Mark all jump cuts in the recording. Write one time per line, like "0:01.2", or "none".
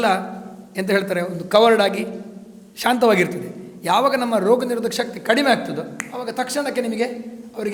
none